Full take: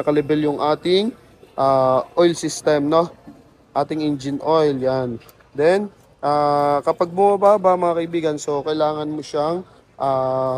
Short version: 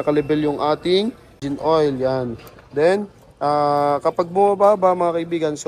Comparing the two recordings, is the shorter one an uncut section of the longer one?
no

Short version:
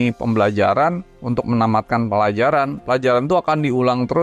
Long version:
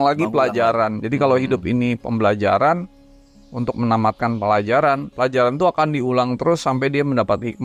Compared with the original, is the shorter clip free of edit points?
no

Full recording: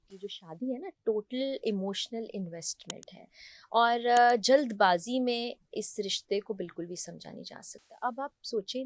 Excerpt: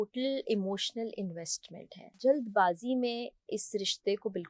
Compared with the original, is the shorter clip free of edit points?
no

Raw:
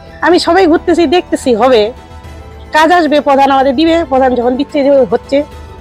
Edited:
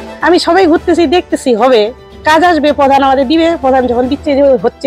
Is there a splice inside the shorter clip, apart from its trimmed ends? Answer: yes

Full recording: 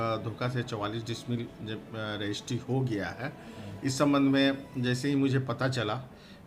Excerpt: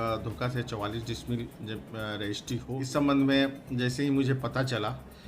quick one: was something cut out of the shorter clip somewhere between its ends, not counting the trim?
yes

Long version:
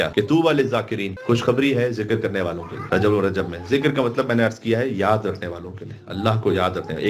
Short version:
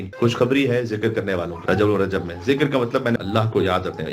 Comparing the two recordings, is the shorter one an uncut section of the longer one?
no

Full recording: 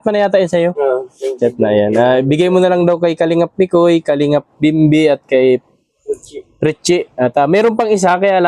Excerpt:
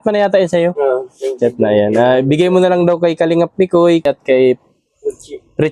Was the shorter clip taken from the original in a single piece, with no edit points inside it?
no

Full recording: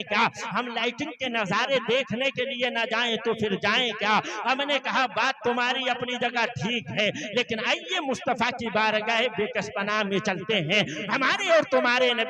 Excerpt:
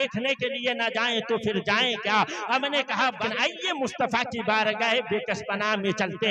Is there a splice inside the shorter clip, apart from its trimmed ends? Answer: yes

